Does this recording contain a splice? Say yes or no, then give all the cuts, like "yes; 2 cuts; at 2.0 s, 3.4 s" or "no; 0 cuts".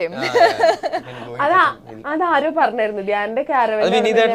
no; 0 cuts